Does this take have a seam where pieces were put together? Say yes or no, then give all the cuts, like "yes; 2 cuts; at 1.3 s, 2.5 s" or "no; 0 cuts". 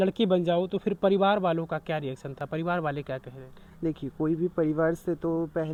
no; 0 cuts